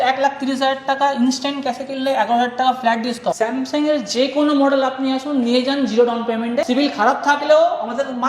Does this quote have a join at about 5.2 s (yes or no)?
no